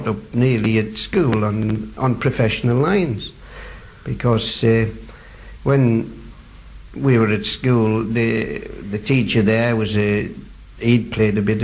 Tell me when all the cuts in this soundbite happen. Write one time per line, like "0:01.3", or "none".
0:01.3